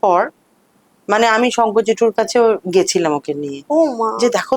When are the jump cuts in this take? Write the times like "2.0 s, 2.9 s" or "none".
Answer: none

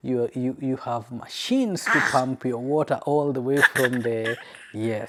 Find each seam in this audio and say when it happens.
none

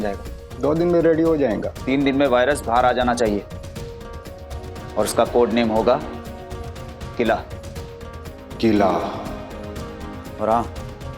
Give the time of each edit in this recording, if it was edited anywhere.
1.7 s

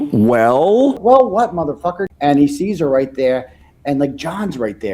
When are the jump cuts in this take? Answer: 1.0 s, 2.1 s

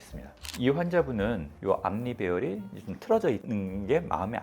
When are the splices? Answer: 1.5 s

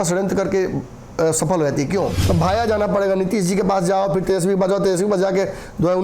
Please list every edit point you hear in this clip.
2.2 s

